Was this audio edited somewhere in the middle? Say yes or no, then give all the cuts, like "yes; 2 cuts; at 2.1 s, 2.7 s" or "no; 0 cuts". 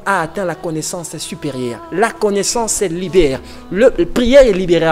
no; 0 cuts